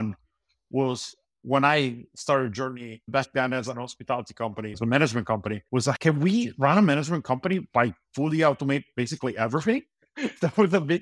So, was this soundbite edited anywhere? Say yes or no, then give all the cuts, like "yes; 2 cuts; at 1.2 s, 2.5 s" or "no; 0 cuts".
yes; 4 cuts; at 3.1 s, 4.7 s, 6.0 s, 10.0 s